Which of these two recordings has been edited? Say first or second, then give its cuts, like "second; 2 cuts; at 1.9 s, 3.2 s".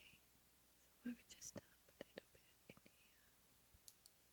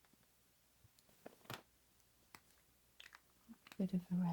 second; 1 cut; at 1.1 s